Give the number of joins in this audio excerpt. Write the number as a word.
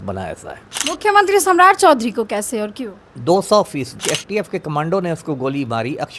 one